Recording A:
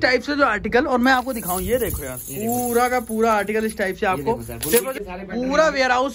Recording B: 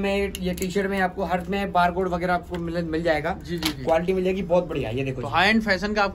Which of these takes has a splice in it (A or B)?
A